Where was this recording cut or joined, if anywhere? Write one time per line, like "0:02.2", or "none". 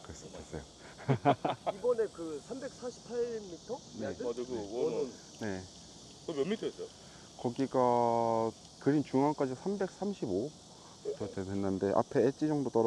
none